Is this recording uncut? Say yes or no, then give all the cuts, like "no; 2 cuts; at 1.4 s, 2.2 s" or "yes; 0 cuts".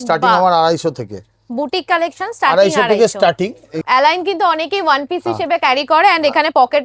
no; 1 cut; at 3.8 s